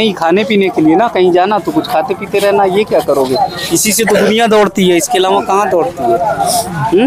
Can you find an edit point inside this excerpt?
no; 0 cuts

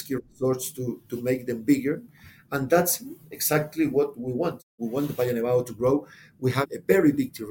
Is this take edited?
yes; 2 cuts; at 4.7 s, 6.6 s

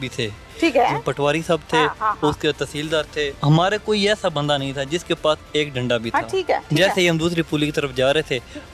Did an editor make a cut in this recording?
yes; 2 cuts; at 3.3 s, 6.6 s

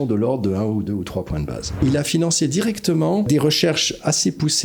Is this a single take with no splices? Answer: no; 2 cuts; at 1.8 s, 3.3 s

